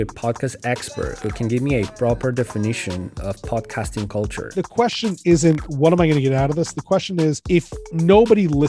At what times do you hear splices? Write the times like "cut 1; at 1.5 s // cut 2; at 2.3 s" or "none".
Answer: cut 1; at 4.4 s // cut 2; at 7.4 s